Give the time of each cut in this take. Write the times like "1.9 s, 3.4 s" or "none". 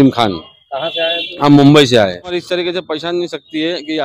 2.3 s